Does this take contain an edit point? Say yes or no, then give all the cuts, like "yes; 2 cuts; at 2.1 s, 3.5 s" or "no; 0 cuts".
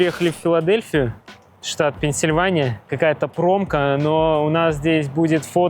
no; 0 cuts